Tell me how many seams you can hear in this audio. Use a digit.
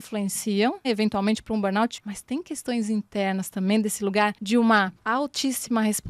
4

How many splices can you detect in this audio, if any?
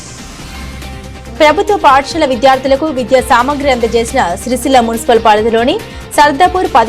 1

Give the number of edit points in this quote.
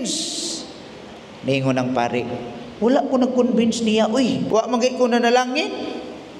1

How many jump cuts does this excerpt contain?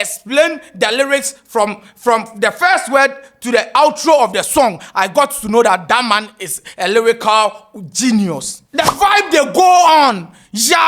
1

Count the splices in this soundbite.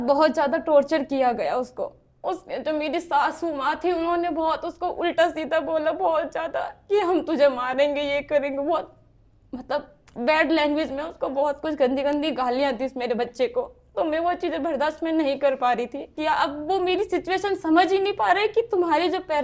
1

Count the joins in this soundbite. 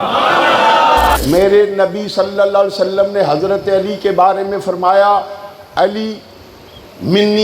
1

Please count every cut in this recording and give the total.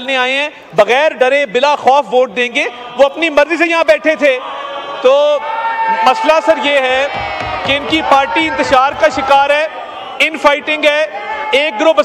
0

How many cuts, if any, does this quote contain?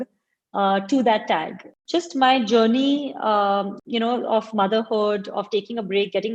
1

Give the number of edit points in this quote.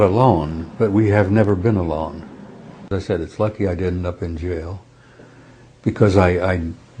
1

